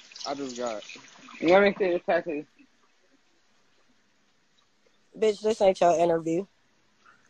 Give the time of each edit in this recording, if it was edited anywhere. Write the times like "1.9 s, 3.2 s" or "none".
none